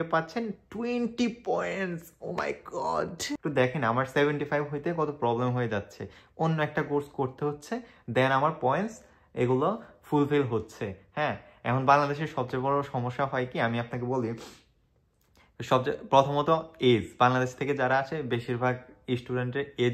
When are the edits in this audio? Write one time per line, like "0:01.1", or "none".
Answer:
0:03.4